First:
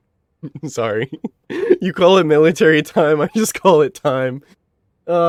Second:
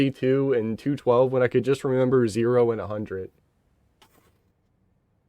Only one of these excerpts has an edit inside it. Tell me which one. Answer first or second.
second